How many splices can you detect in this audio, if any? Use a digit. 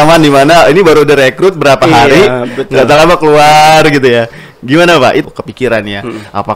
1